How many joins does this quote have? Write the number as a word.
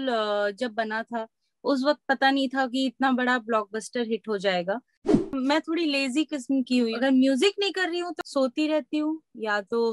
three